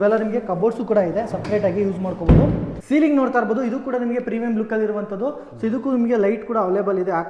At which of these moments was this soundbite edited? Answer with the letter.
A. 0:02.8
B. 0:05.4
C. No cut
A